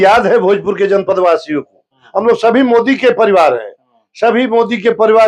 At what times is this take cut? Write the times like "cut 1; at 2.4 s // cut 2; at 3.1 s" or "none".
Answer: cut 1; at 2.0 s